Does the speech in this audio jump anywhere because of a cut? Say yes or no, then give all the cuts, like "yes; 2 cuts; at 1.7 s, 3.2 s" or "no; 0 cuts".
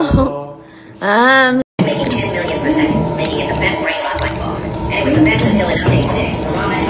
yes; 1 cut; at 1.7 s